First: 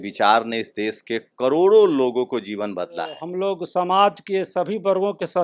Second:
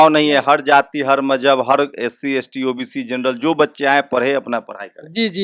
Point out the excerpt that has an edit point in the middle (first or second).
first